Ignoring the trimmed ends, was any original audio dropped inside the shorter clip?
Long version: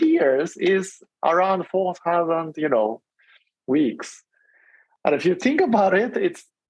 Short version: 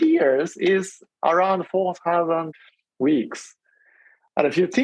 yes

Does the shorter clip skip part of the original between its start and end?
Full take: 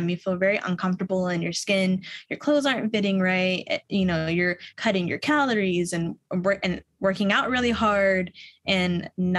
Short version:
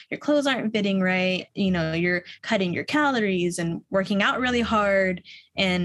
yes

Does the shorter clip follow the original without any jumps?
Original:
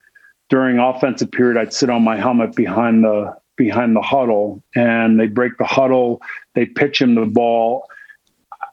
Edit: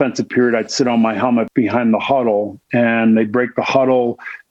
no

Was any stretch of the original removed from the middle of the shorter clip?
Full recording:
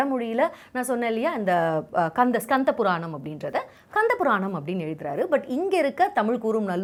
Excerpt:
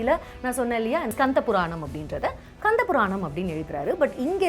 yes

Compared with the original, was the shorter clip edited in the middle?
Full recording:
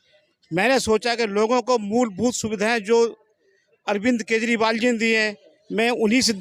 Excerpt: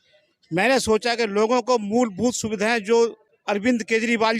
yes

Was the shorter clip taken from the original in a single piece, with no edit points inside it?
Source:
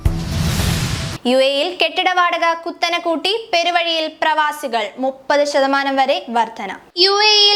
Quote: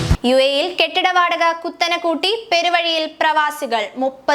yes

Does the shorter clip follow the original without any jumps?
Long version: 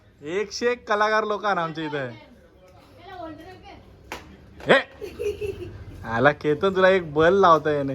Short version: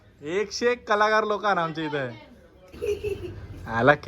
no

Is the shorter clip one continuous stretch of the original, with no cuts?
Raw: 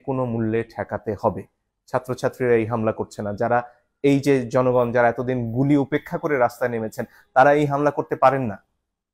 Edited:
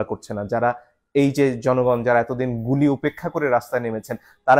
yes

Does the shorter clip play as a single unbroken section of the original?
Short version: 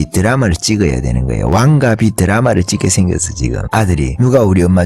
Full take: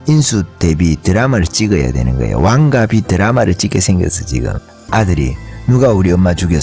no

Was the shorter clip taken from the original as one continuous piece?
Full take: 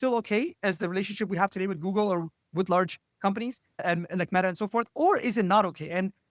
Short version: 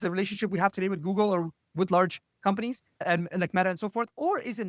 yes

